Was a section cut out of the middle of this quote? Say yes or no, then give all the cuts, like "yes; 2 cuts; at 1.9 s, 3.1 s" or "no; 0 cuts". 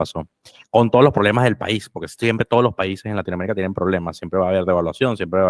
no; 0 cuts